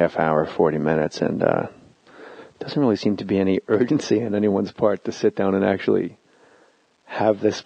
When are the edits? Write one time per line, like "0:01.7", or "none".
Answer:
0:02.4